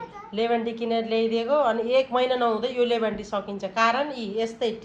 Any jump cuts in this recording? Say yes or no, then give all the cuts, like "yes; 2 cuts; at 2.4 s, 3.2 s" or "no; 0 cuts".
no; 0 cuts